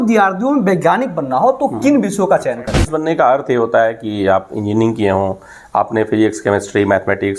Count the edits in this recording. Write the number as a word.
one